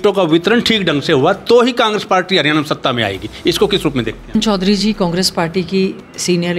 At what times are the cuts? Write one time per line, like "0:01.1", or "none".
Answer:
0:04.4